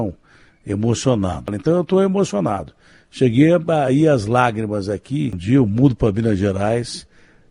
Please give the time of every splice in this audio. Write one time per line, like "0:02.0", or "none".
0:01.5
0:05.4